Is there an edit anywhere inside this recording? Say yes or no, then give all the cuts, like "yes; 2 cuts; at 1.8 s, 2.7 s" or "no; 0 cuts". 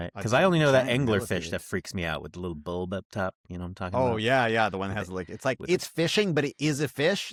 no; 0 cuts